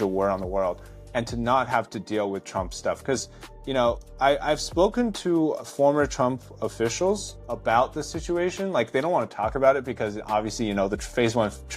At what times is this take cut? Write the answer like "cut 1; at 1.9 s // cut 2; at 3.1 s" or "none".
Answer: cut 1; at 4.1 s // cut 2; at 5.6 s // cut 3; at 7.3 s